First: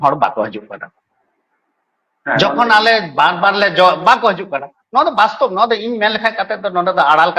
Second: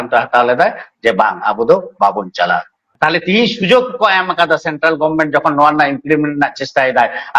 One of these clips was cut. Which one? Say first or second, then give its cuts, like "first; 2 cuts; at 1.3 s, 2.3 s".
second; 1 cut; at 2.9 s